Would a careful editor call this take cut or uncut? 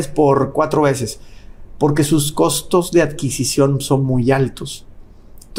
uncut